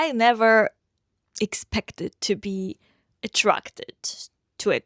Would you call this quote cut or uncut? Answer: uncut